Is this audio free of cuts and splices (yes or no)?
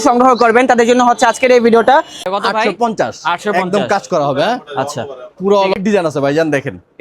no